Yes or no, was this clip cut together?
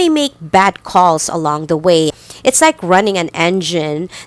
yes